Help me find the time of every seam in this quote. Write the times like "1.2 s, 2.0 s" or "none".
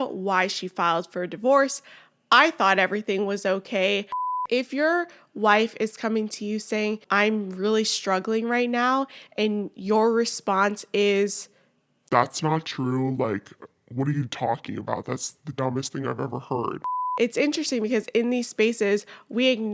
4.4 s, 7.0 s, 16.9 s

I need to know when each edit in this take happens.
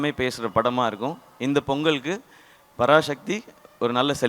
none

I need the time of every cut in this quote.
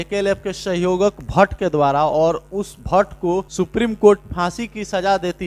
3.5 s

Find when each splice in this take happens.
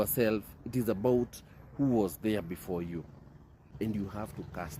3.6 s

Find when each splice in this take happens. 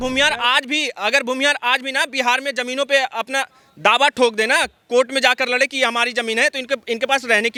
none

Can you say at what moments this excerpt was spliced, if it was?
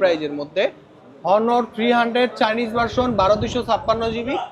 none

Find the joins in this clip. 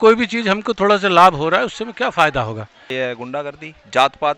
2.9 s

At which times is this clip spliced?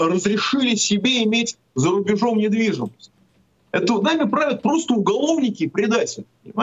none

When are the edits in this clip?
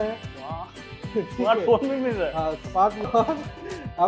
3.0 s

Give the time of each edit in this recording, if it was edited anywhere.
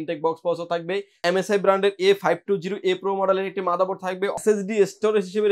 1.2 s, 4.4 s

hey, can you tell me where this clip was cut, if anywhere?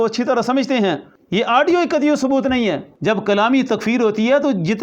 1.1 s, 2.9 s

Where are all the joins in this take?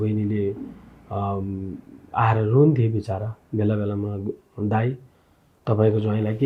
none

